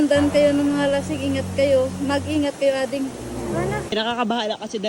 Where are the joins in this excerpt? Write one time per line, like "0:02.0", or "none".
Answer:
0:03.9

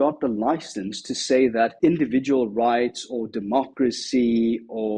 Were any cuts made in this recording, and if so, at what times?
0:01.7

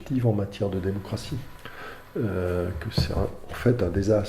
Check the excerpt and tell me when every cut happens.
0:01.5

